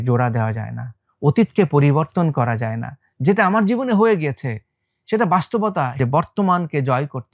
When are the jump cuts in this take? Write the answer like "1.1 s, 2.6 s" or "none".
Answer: 6.0 s